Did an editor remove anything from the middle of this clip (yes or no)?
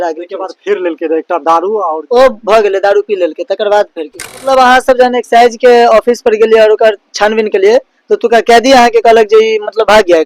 yes